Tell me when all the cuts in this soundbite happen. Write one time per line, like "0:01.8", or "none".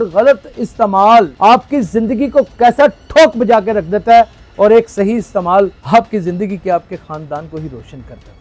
0:01.3
0:05.8